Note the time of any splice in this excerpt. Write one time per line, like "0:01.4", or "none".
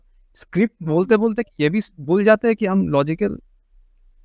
none

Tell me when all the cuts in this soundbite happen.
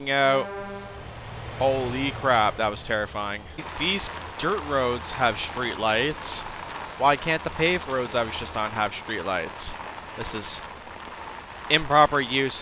0:03.7

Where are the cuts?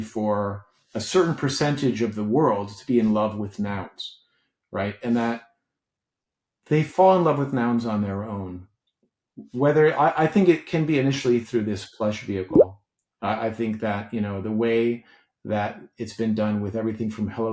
none

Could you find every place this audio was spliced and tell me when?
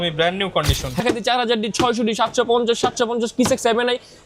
0:01.0

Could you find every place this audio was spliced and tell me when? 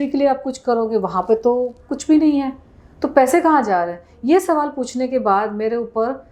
none

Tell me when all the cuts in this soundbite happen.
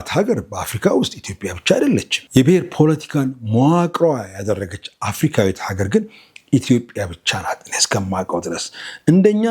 0:02.2

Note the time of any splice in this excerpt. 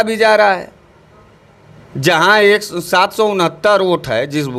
none

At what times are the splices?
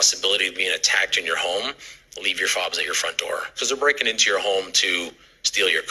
none

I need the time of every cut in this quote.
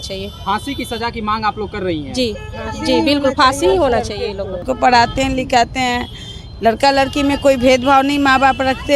0:04.6

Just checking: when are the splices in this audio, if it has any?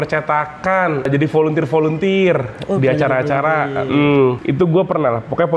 0:01.1
0:04.4

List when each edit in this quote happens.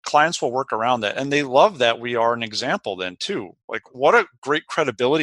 0:03.9

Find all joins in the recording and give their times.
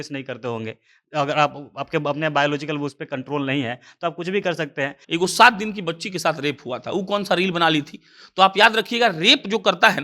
0:05.0

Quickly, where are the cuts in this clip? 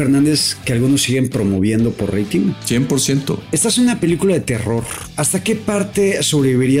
0:02.6
0:03.4
0:05.3

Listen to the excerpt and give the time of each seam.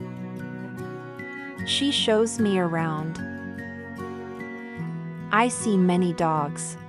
none

